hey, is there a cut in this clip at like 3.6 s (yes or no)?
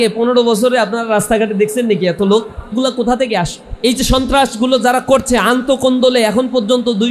yes